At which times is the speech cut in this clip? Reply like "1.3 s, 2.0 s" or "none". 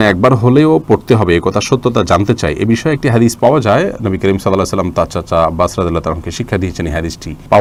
none